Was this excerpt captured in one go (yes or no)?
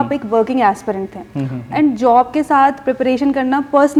yes